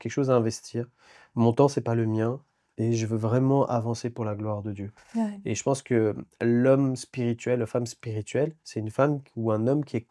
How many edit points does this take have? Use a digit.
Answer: 1